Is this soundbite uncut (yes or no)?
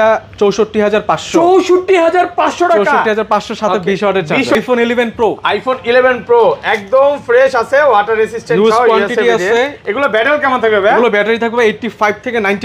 no